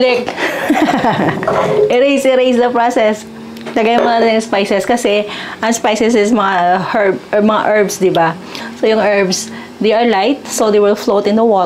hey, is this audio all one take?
yes; 0 cuts

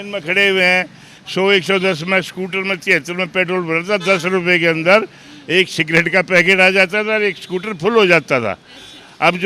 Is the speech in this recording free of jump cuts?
yes; 0 cuts

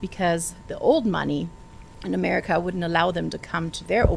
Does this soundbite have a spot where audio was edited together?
no; 0 cuts

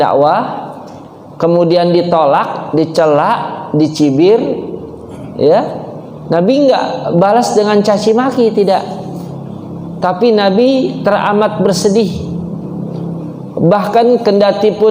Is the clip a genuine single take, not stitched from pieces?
yes; 0 cuts

